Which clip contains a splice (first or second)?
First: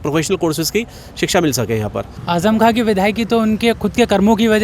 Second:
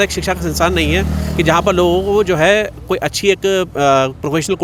first